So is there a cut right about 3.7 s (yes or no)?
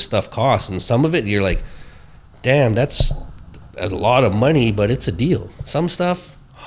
no